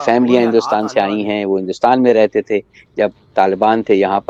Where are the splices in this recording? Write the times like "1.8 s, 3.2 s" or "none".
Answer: none